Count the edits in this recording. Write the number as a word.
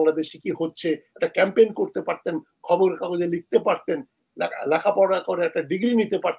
zero